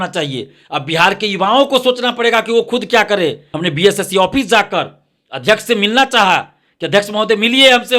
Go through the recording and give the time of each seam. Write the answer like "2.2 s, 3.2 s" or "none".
3.5 s